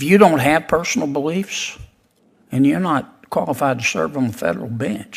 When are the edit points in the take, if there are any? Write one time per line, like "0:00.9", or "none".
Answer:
none